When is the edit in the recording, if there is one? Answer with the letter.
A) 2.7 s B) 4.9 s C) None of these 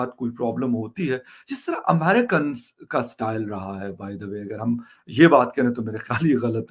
C